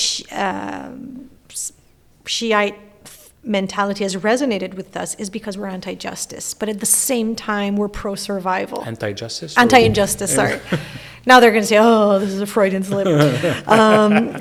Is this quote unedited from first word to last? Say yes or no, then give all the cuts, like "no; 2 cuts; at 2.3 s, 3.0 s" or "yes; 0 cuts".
yes; 0 cuts